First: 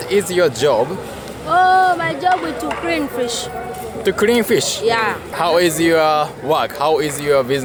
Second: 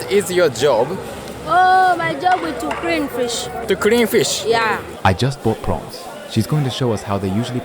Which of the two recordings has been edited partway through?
second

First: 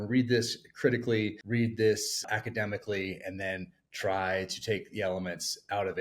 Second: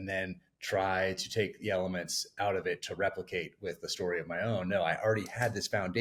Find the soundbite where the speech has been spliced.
first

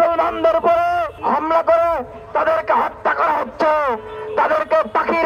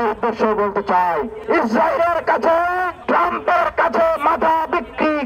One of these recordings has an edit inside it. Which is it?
first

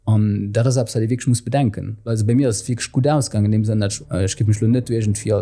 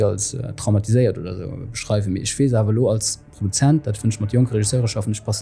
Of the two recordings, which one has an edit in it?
first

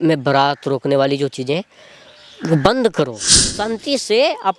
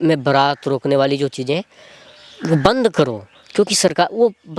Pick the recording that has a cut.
first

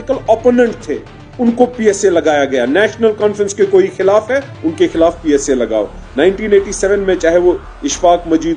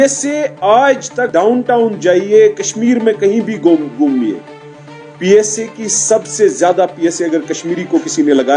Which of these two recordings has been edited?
second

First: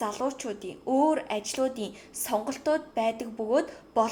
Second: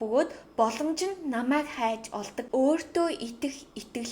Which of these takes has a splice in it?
second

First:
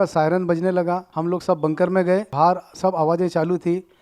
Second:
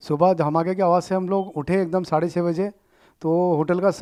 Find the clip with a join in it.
first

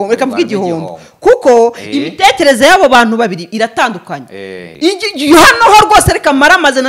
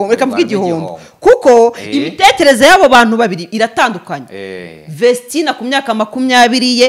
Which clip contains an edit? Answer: first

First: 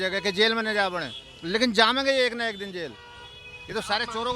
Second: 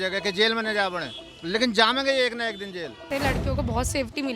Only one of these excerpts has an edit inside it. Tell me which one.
second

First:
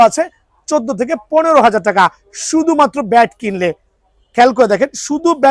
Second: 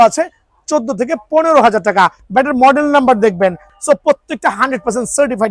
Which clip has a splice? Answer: second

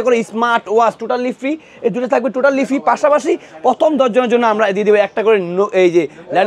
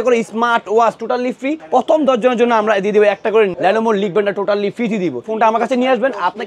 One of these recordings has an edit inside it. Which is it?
second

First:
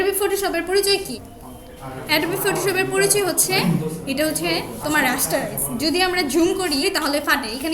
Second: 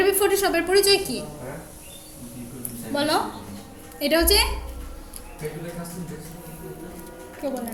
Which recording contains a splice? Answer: first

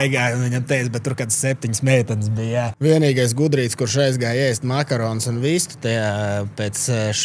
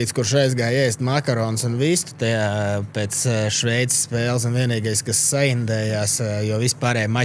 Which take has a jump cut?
first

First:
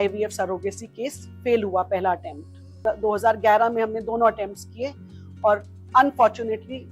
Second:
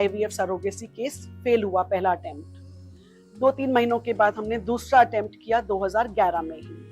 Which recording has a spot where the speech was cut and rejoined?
first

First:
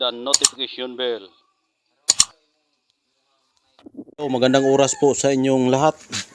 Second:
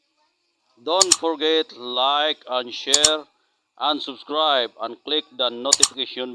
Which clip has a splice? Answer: first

